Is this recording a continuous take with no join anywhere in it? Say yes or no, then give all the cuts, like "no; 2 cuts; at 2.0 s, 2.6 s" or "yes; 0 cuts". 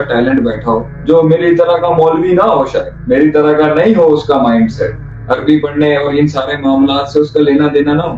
no; 2 cuts; at 0.9 s, 2.9 s